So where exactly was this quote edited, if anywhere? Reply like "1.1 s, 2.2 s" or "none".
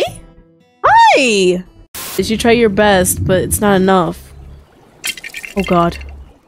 2.2 s